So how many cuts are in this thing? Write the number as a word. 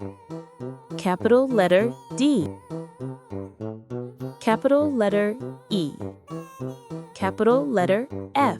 two